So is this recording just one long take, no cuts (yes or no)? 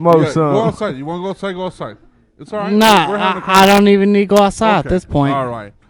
yes